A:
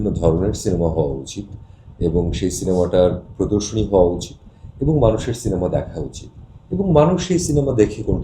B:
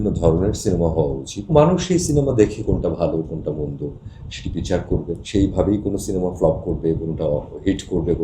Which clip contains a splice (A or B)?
B